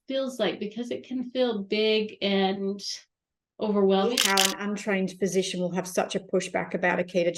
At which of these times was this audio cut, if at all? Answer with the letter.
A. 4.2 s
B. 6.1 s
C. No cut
A